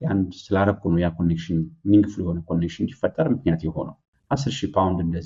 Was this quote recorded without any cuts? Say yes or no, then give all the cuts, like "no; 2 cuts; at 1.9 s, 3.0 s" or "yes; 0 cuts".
no; 1 cut; at 4.3 s